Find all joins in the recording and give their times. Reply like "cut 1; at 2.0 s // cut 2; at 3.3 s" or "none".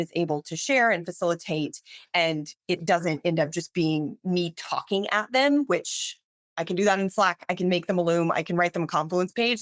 none